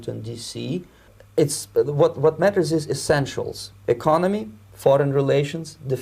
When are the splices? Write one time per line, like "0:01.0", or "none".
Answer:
0:01.2